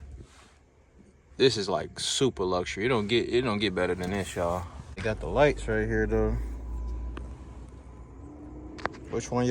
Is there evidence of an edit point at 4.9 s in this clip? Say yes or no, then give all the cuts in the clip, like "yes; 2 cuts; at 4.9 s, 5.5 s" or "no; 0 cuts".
yes; 1 cut; at 4.9 s